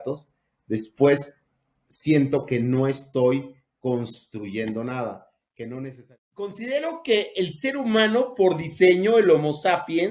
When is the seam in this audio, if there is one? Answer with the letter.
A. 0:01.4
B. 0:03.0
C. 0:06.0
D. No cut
C